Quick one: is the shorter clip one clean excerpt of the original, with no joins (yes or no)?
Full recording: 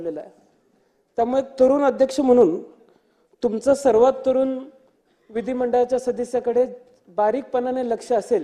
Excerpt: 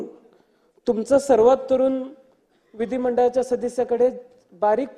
yes